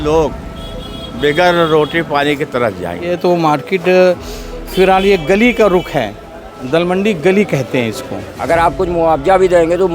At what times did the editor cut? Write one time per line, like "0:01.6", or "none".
0:03.2
0:08.7

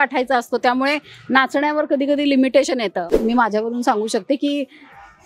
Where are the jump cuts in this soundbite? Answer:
0:03.1

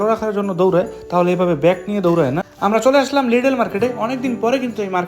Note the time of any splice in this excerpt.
0:02.4

